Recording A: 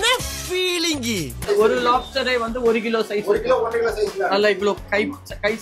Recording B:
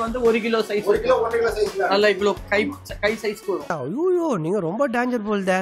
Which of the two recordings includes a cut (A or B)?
A